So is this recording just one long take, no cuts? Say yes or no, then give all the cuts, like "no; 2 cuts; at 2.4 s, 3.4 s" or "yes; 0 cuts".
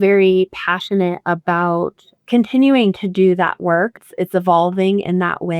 no; 2 cuts; at 2.1 s, 4.0 s